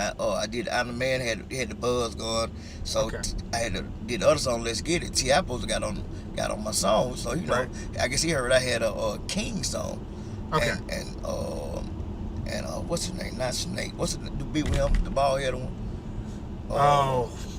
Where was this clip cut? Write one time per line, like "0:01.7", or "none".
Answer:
none